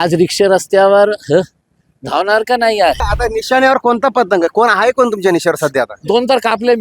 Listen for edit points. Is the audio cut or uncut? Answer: cut